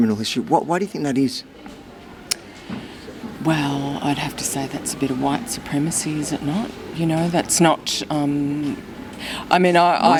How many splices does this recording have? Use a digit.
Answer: 0